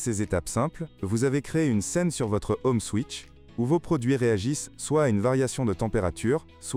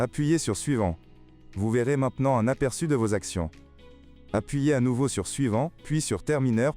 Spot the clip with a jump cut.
second; 1 cut; at 5.8 s

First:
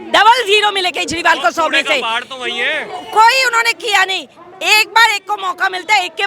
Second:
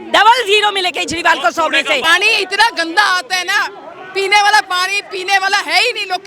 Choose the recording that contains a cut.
second; 1 cut; at 2.0 s

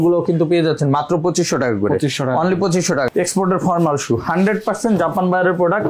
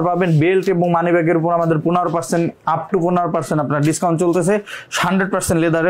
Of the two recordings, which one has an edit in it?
first; 1 cut; at 3.1 s

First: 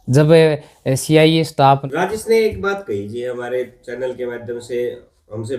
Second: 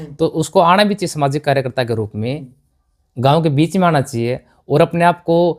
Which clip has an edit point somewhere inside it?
first; 1 cut; at 1.8 s

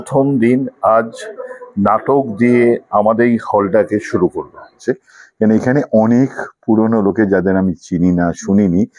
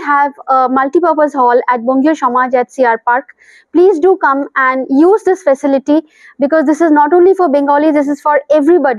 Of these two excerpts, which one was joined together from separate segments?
first; 1 cut; at 4.8 s

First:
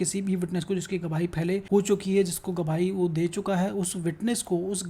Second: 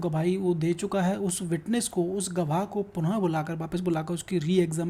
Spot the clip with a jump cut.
first; 1 cut; at 1.6 s

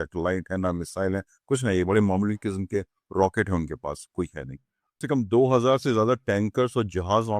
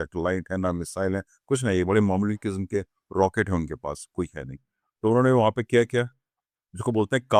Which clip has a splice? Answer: first; 1 cut; at 5.0 s

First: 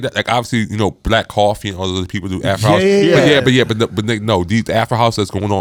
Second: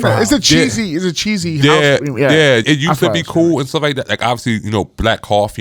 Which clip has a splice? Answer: second; 1 cut; at 2.6 s

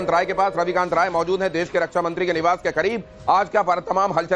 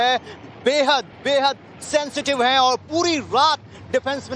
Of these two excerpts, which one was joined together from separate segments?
first; 1 cut; at 1.5 s

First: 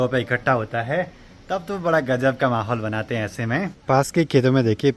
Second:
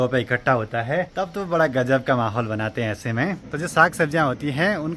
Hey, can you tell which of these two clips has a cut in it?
second; 2 cuts; at 1.1 s, 3.4 s

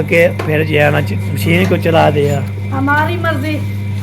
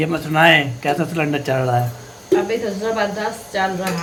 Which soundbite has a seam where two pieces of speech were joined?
first; 1 cut; at 2.5 s

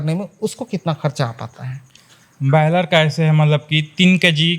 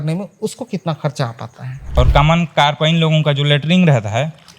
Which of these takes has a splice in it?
second; 1 cut; at 1.9 s

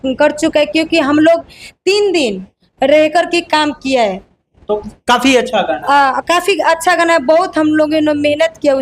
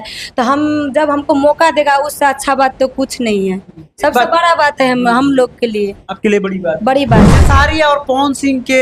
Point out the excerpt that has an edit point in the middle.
second; 1 cut; at 7.3 s

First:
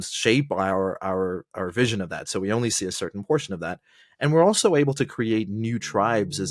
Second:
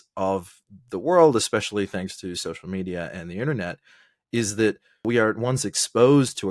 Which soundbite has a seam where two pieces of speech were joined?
second; 1 cut; at 5.0 s

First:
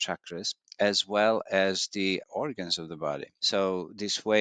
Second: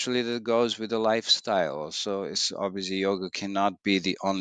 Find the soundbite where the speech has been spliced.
first; 1 cut; at 3.3 s

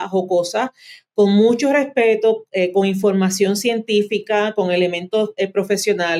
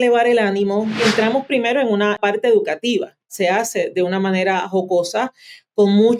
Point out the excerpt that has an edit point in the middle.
second; 3 cuts; at 1.0 s, 2.2 s, 3.3 s

